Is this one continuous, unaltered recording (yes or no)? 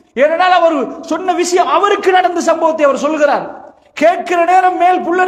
yes